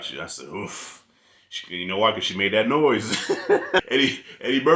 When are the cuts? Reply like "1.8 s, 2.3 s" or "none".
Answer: 3.9 s